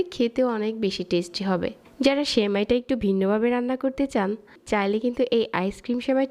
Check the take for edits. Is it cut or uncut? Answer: cut